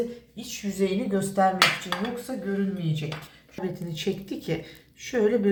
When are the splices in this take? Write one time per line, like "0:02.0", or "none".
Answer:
none